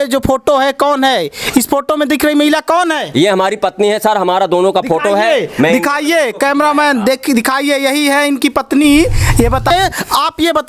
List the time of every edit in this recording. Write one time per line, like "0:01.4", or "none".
0:09.7

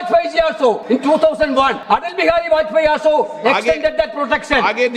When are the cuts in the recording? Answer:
0:00.8
0:01.8

